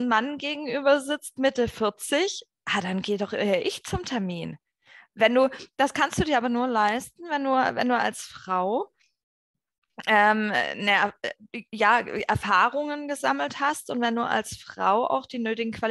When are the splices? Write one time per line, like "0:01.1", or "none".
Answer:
none